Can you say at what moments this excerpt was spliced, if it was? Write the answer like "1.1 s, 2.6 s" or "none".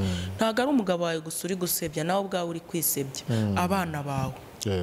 none